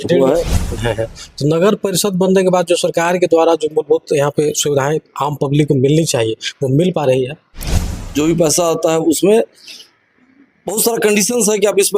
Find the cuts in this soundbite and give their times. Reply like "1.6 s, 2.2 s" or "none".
0.8 s, 8.0 s